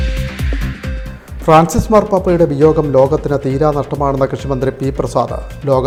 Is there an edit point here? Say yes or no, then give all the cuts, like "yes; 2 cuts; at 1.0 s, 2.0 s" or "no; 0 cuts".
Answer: no; 0 cuts